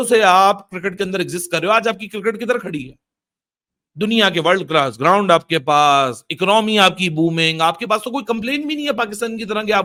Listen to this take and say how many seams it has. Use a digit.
0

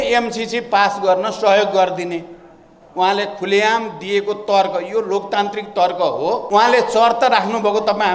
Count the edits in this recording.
1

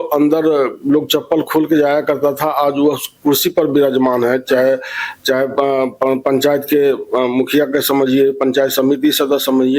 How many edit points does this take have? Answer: 0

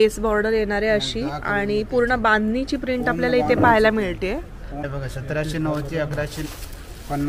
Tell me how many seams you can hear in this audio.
1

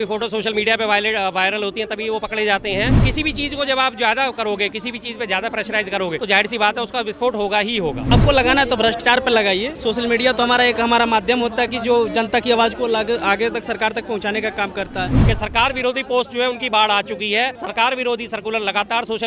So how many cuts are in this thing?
6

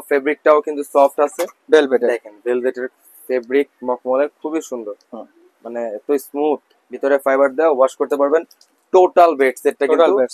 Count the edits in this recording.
0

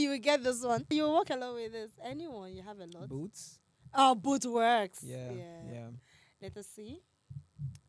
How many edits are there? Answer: 1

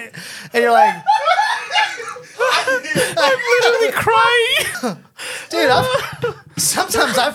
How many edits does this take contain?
2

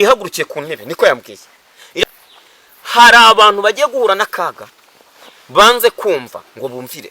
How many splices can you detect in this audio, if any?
1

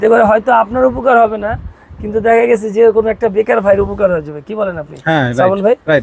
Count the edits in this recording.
0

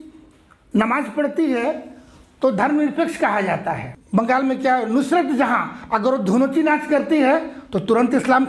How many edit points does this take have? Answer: 1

